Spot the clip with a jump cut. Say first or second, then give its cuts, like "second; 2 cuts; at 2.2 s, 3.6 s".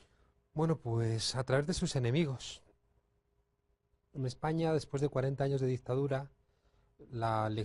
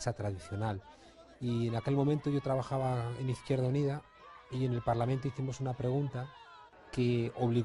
second; 1 cut; at 2.7 s